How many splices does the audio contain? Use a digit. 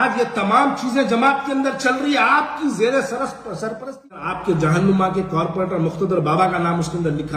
1